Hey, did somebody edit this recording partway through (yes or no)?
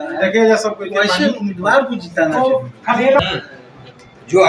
yes